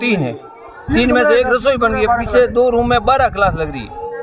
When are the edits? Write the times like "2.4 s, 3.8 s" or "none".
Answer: none